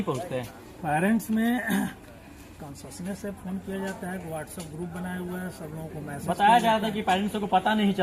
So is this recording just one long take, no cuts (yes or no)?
yes